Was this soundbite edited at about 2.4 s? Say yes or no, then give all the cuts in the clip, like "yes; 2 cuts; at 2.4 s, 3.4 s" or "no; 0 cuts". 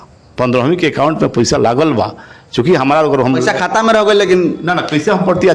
no; 0 cuts